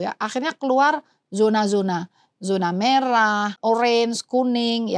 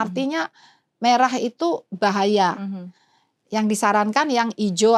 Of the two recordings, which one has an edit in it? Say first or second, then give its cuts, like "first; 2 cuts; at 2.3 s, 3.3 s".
first; 1 cut; at 3.6 s